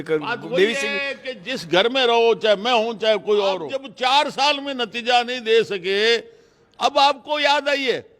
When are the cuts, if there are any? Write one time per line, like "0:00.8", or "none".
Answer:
0:03.8